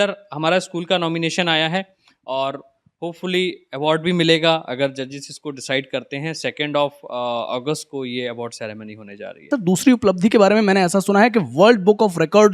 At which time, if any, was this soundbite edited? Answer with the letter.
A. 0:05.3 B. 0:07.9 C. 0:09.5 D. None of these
C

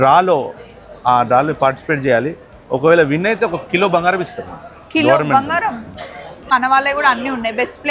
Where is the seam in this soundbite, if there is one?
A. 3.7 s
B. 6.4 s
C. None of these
B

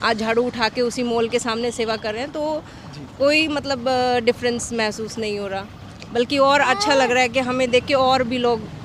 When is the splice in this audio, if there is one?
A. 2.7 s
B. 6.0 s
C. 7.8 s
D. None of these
D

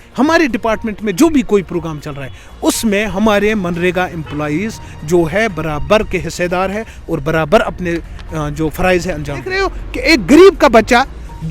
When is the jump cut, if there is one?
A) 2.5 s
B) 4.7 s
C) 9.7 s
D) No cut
C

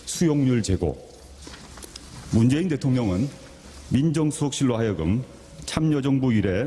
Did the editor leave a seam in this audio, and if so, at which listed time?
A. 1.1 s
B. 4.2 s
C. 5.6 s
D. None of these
B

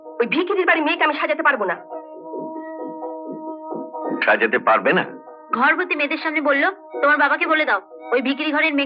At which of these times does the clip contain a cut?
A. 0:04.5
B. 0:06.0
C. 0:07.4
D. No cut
D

